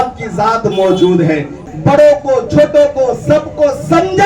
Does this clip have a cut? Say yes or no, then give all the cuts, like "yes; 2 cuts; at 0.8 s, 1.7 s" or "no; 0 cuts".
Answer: yes; 1 cut; at 1.6 s